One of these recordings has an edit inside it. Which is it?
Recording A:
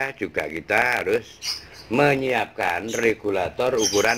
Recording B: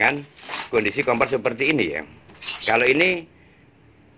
A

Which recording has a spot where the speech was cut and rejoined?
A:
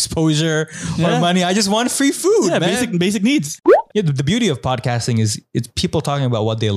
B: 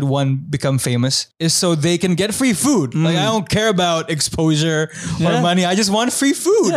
A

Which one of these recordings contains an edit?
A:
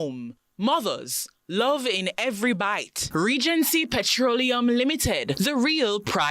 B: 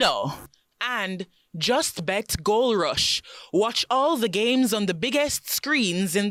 A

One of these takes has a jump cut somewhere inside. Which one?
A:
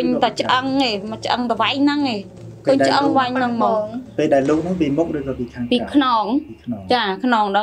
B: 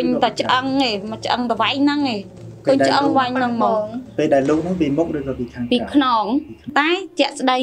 B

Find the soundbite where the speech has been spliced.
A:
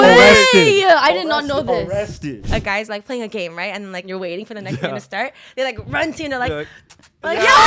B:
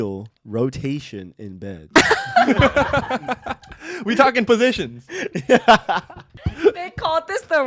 A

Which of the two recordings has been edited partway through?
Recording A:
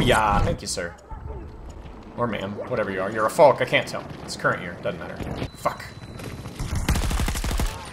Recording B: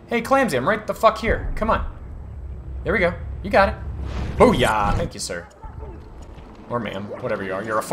A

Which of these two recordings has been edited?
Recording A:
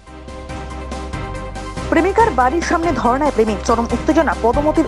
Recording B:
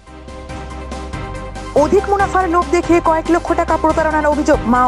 A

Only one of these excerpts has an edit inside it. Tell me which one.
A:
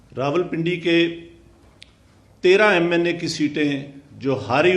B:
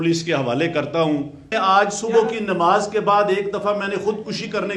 B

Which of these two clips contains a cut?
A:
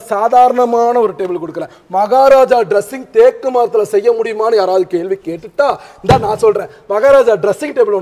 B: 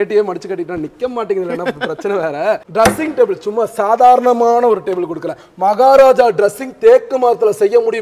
B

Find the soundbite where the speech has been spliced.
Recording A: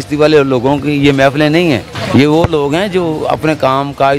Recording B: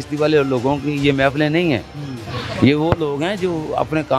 A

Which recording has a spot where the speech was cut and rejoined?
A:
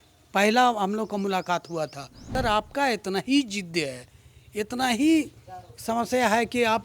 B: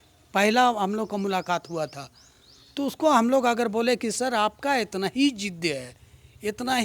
A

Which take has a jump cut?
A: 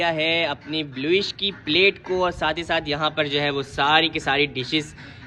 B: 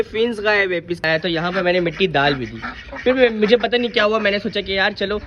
B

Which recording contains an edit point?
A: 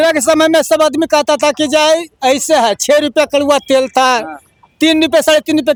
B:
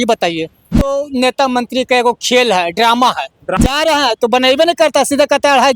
B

